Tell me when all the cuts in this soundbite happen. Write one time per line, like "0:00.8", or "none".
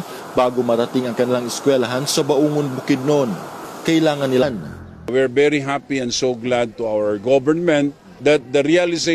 none